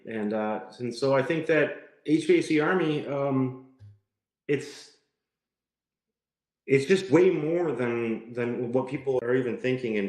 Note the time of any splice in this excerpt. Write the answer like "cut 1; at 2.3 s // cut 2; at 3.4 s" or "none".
cut 1; at 9.2 s